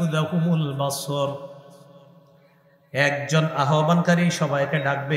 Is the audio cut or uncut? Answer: uncut